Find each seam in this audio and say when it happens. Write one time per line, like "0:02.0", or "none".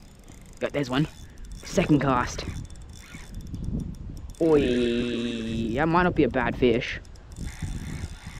none